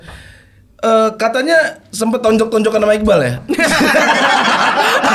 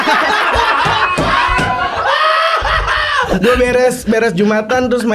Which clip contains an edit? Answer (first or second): second